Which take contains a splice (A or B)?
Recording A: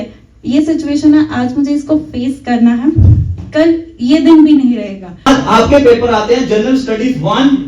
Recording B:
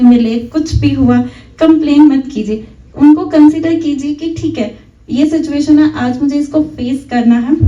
A